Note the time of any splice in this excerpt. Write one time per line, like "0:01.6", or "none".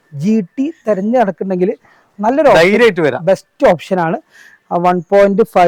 none